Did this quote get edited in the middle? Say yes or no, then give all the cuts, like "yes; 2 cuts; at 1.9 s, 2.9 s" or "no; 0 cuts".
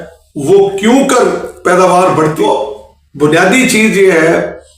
yes; 1 cut; at 2.1 s